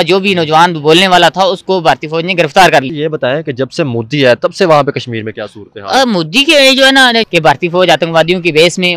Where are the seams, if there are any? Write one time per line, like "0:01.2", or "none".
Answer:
0:02.9
0:07.2

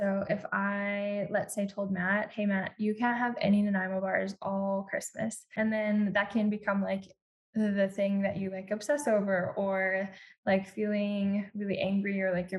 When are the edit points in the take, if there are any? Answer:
0:05.4

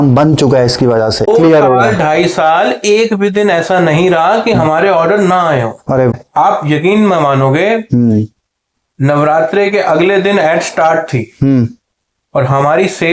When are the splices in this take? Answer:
0:01.3
0:06.1

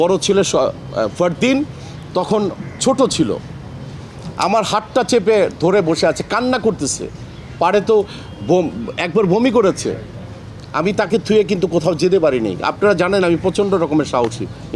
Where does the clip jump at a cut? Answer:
none

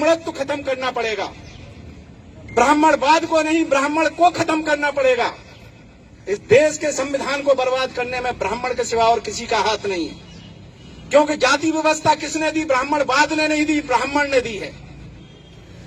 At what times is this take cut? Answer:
none

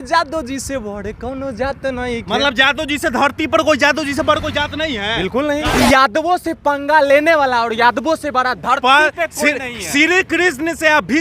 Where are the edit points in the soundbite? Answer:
0:05.6

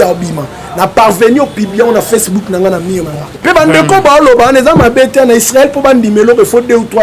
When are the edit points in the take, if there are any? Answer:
0:03.2

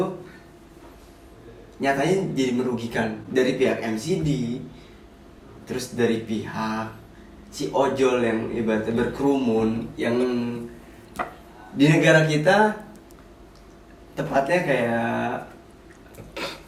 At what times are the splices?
none

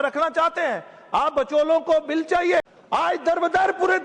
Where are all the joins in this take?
0:02.8

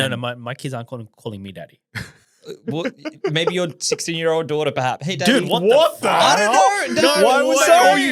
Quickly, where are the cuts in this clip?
none

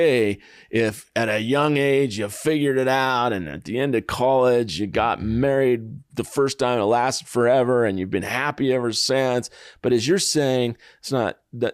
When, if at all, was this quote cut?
none

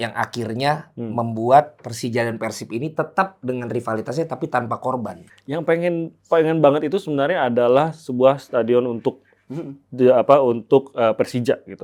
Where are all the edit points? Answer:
0:05.2

